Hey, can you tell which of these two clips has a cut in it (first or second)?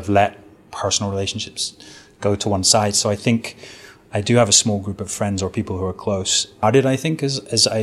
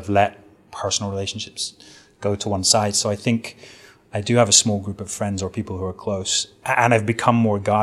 first